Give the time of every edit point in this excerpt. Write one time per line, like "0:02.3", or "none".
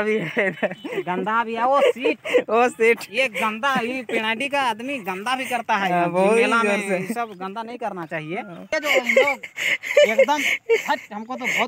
0:06.5
0:08.7